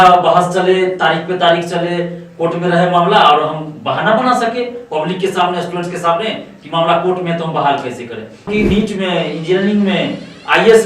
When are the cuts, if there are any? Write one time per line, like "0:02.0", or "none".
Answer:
0:08.5